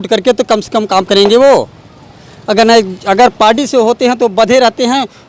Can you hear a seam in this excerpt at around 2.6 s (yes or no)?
no